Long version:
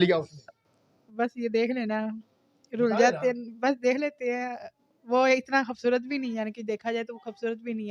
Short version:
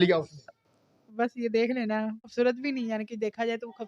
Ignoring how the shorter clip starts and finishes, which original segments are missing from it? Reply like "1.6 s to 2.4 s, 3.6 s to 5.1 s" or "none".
2.3 s to 5.7 s